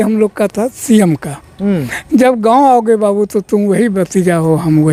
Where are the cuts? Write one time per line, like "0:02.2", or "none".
none